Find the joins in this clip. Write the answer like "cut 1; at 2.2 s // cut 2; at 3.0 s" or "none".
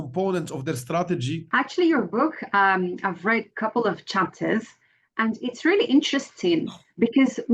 cut 1; at 1.4 s